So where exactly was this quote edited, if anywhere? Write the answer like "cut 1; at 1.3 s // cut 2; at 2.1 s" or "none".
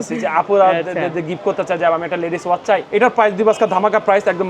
cut 1; at 2.9 s